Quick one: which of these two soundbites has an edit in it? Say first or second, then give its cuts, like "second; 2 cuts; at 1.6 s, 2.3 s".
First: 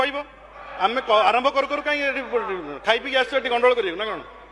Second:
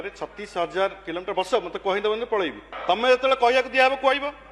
second; 1 cut; at 2.7 s